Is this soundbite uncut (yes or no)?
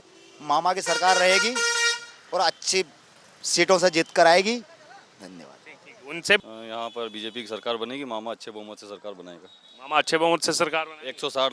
no